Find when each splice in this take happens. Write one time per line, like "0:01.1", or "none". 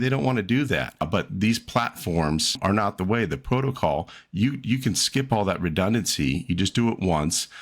0:01.1
0:02.6